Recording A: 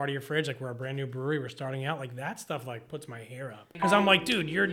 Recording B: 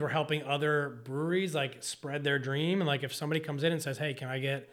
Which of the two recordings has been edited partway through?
A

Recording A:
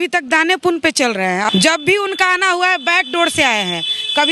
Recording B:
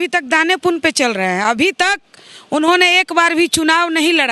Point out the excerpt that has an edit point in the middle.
A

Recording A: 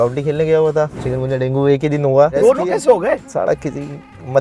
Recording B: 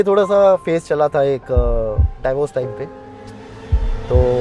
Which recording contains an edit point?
A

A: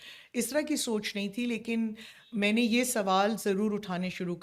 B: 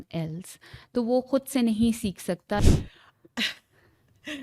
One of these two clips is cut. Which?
B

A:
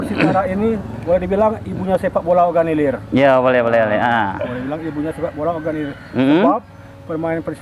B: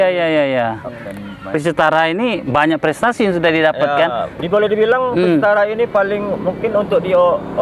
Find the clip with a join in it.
B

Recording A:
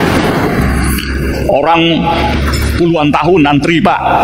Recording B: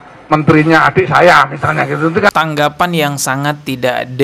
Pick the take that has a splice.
B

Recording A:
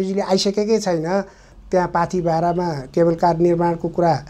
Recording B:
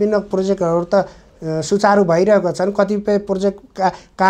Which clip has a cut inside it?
A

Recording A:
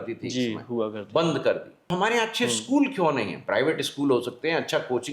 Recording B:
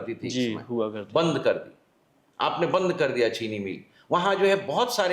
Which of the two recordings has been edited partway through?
A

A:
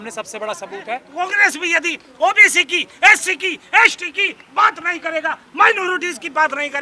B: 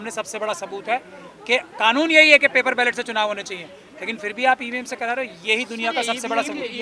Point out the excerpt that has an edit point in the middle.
A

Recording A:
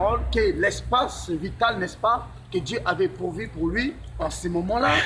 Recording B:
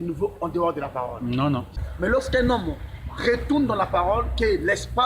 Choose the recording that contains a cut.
B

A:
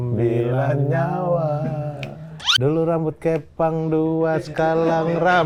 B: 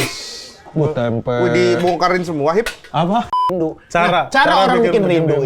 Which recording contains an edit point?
B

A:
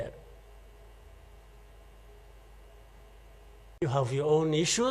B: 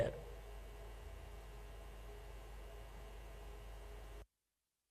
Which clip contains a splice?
A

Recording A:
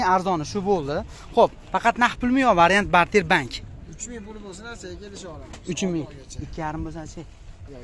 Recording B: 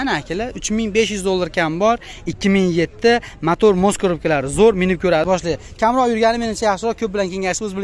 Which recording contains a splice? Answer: B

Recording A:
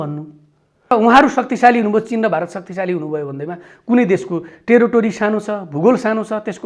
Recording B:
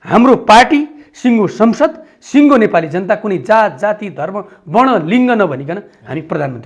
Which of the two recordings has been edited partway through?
A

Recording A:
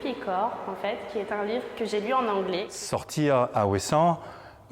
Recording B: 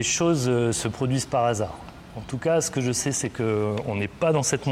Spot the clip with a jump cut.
A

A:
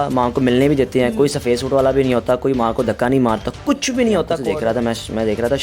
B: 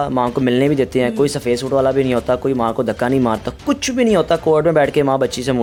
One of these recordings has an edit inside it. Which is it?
A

